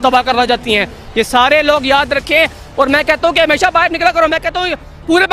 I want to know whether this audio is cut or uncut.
uncut